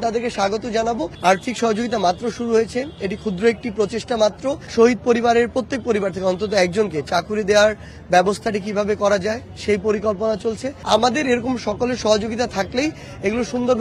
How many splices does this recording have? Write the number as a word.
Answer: three